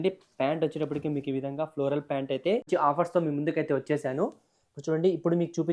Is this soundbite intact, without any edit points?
no; 1 cut; at 2.7 s

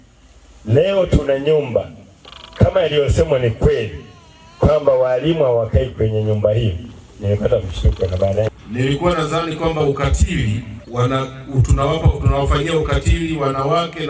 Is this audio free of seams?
no; 2 cuts; at 8.5 s, 10.8 s

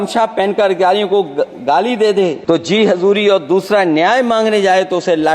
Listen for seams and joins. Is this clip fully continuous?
no; 1 cut; at 2.4 s

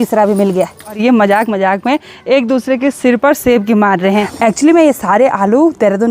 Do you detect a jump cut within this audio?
yes; 2 cuts; at 1.0 s, 4.3 s

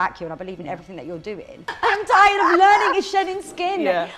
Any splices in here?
yes; 1 cut; at 1.7 s

